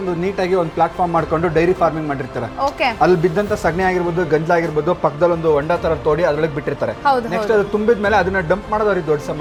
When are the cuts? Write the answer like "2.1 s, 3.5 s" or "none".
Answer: none

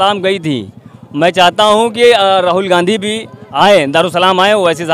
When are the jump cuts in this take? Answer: none

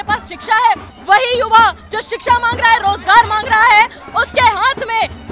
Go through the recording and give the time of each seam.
0.9 s

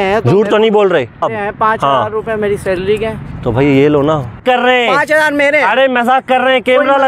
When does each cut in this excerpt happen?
1.2 s, 4.4 s

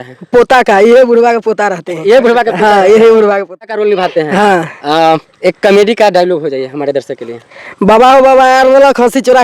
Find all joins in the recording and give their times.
3.7 s

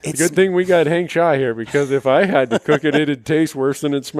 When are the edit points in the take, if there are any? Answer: none

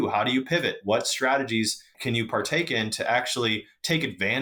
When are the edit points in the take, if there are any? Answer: none

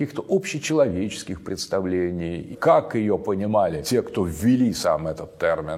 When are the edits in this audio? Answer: 2.4 s, 3.8 s

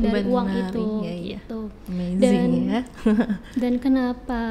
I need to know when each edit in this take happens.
none

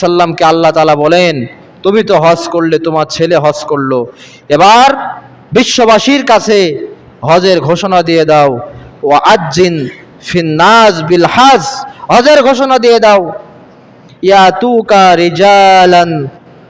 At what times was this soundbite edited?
none

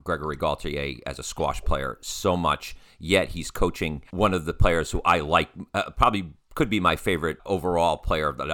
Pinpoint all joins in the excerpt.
4.0 s, 7.4 s

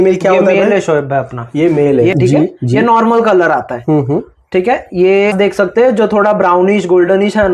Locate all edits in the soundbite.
2.1 s, 5.3 s

